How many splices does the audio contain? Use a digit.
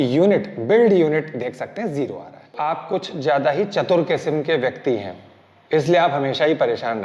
1